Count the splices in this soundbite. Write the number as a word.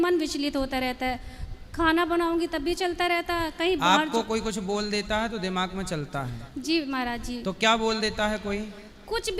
zero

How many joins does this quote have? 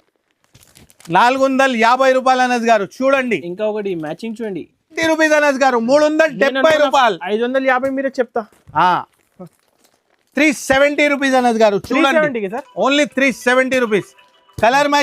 one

